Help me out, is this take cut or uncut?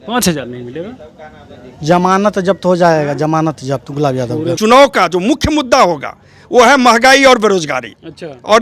cut